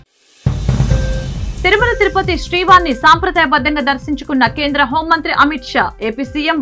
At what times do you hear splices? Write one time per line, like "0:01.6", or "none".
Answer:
0:01.5

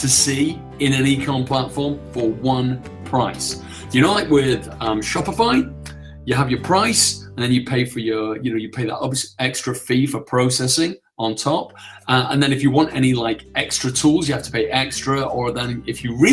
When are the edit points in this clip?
none

